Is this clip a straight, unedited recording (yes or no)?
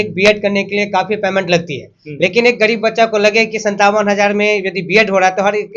yes